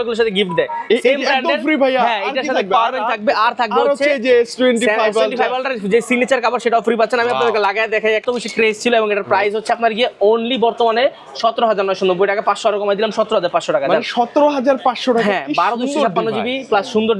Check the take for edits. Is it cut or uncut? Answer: cut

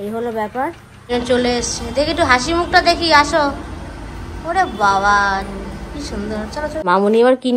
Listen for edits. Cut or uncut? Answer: cut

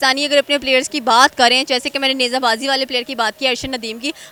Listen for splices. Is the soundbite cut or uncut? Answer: uncut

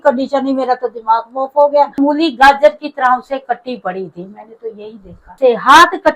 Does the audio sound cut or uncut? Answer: cut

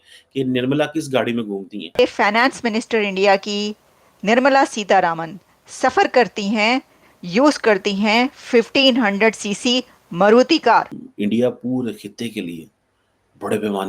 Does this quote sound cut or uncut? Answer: cut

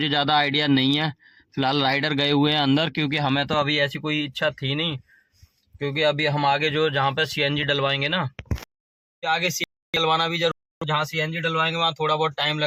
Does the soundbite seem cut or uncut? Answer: uncut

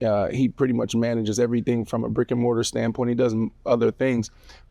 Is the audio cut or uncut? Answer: uncut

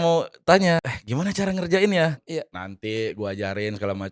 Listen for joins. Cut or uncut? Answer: cut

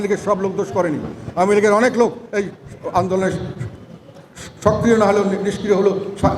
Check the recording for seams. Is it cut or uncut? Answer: uncut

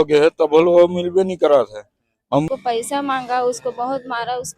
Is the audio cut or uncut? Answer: cut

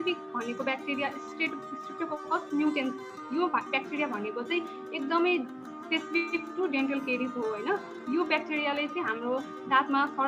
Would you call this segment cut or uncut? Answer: uncut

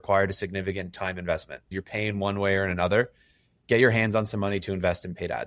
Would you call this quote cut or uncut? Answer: cut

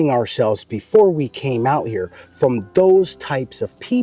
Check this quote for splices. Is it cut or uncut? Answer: uncut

